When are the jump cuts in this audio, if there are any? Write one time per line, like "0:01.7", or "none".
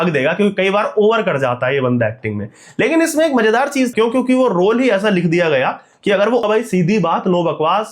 0:03.9
0:06.4